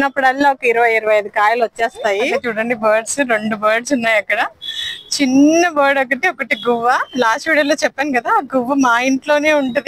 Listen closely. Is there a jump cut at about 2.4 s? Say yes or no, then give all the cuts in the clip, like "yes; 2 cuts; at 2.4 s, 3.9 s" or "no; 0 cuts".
yes; 1 cut; at 2.4 s